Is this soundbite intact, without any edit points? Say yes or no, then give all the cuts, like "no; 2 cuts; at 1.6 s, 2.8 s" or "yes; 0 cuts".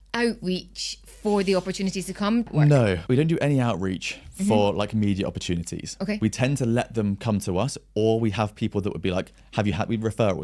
no; 1 cut; at 2.9 s